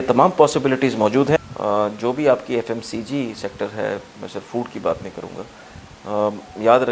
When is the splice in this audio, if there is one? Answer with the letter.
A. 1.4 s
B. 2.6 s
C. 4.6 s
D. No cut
A